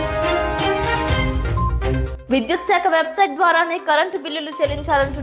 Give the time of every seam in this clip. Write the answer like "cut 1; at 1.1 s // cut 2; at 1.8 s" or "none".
cut 1; at 2.1 s